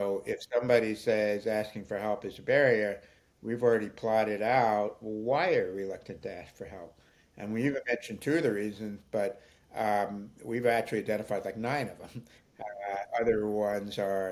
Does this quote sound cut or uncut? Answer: uncut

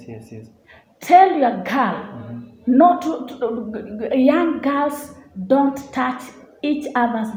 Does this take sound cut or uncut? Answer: uncut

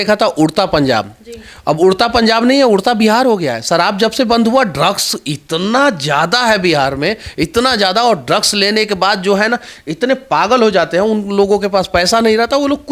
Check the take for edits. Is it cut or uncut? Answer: uncut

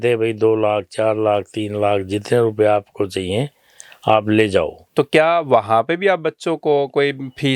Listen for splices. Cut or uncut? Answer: cut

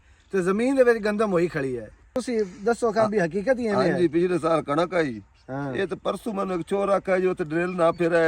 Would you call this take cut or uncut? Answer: cut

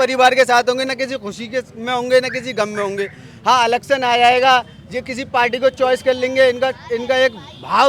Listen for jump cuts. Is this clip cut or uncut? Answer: uncut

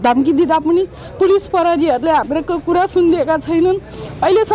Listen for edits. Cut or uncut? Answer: uncut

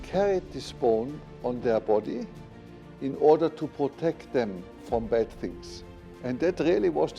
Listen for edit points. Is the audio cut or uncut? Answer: uncut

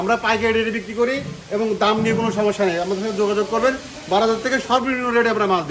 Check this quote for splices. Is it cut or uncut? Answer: uncut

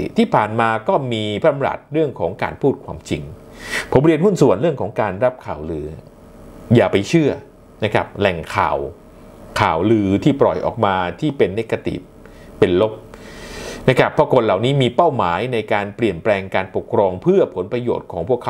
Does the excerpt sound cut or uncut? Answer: uncut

